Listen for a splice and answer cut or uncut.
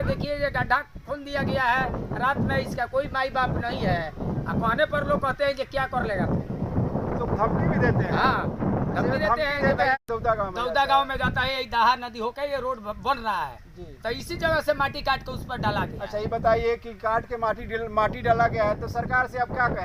uncut